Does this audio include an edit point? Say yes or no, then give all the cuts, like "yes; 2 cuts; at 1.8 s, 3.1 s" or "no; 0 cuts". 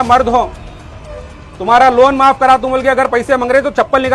no; 0 cuts